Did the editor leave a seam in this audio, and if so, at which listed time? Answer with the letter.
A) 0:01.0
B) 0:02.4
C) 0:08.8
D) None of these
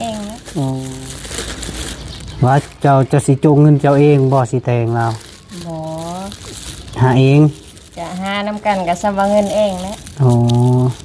A